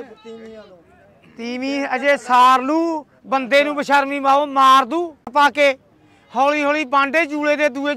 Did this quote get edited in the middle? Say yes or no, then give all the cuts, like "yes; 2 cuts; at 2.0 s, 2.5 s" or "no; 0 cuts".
yes; 1 cut; at 5.2 s